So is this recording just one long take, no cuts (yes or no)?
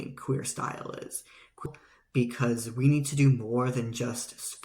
no